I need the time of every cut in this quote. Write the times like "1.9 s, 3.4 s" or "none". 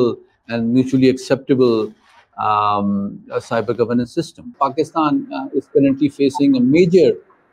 4.5 s